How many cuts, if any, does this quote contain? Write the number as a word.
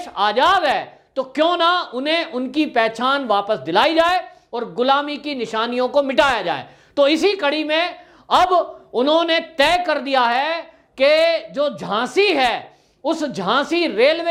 zero